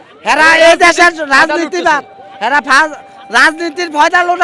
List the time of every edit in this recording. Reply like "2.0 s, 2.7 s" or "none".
none